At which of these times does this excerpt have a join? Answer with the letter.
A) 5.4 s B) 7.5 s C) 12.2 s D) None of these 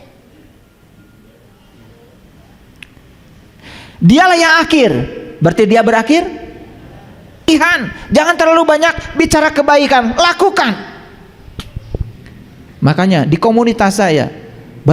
B